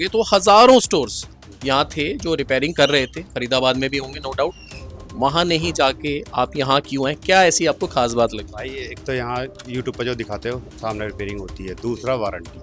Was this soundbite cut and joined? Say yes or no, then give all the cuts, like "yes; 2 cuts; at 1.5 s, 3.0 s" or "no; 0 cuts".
no; 0 cuts